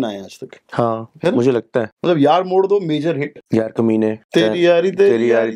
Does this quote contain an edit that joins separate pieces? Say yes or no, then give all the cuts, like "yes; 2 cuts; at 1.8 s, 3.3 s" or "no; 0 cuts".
yes; 3 cuts; at 1.9 s, 3.4 s, 4.2 s